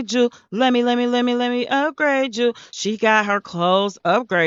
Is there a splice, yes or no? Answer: no